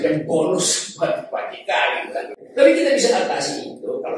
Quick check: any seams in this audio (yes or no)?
yes